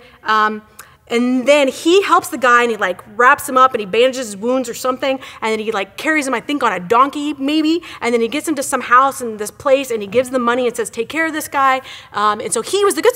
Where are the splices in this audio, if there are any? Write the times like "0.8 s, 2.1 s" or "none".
7.8 s, 10.6 s